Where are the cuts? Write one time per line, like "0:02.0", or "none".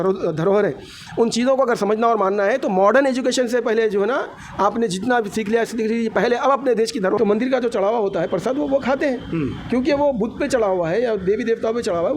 0:07.2